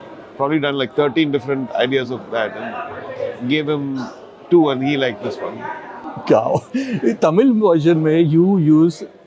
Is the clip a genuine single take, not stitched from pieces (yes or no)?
yes